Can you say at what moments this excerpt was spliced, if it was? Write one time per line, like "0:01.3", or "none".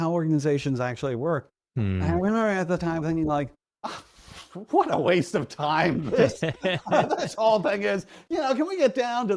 none